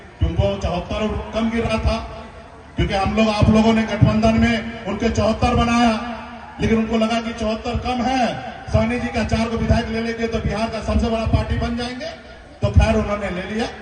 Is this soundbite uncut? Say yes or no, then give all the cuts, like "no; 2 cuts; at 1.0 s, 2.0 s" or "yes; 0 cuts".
yes; 0 cuts